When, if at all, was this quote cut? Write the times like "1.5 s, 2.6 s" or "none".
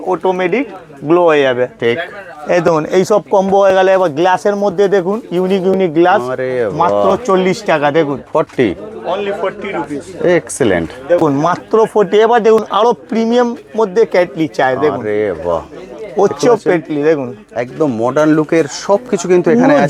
none